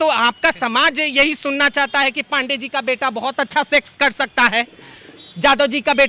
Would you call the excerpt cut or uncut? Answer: uncut